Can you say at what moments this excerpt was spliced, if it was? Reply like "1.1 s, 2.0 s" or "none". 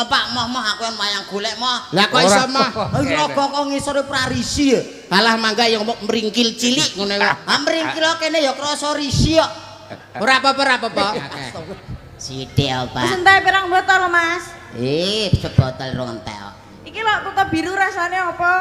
11.6 s